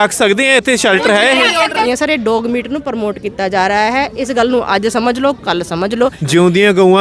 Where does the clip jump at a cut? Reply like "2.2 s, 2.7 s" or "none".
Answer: 1.8 s, 6.2 s